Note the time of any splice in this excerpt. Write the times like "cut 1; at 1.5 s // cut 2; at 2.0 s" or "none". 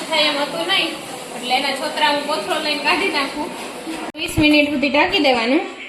cut 1; at 4.1 s